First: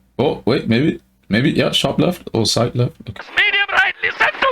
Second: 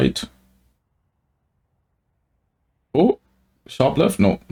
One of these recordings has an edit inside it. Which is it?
first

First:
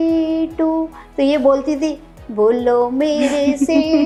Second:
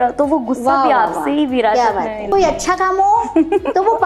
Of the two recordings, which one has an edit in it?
second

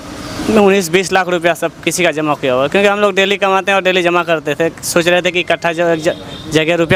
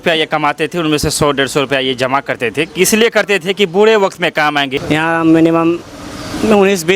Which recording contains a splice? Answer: second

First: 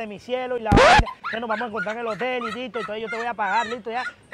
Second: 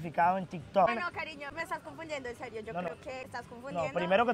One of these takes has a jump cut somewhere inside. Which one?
second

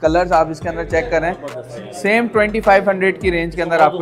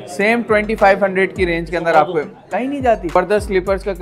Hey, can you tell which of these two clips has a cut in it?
second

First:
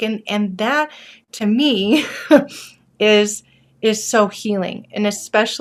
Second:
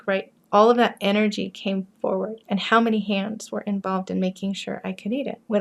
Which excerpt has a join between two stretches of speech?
second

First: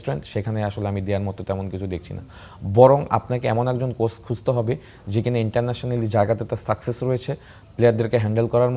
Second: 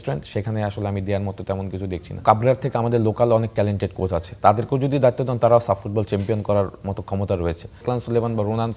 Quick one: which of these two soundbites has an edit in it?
second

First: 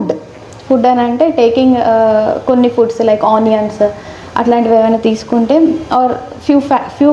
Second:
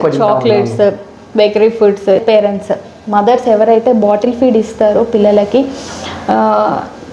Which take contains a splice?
second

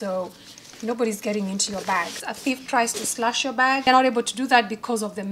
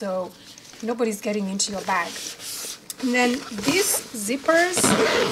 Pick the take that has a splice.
first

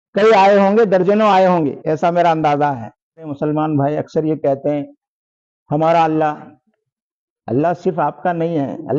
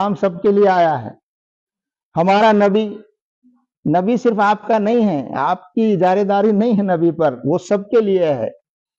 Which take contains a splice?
first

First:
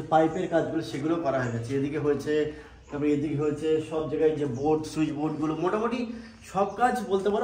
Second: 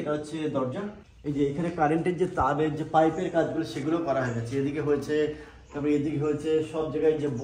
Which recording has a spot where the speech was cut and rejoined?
second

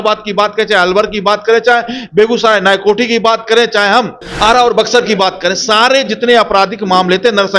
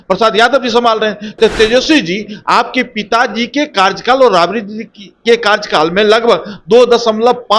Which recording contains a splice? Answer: first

